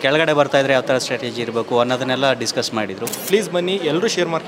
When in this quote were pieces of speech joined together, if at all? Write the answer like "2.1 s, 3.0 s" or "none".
3.1 s